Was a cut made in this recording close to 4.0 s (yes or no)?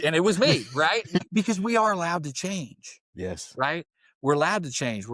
no